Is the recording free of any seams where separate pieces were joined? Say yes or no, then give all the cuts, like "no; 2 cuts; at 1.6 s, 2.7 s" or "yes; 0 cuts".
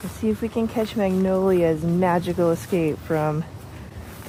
yes; 0 cuts